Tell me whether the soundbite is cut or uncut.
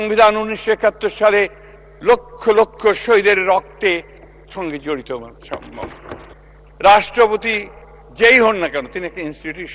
cut